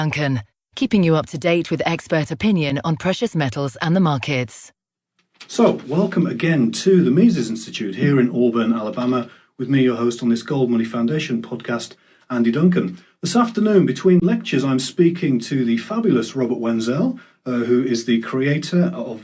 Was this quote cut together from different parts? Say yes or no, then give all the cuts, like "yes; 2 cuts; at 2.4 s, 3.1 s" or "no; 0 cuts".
yes; 1 cut; at 12.6 s